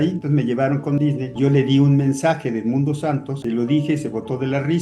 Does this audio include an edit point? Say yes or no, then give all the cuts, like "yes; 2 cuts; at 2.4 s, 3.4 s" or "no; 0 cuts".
yes; 1 cut; at 3.4 s